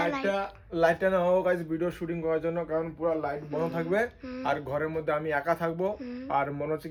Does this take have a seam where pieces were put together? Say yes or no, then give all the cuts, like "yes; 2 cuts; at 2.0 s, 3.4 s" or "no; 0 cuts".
no; 0 cuts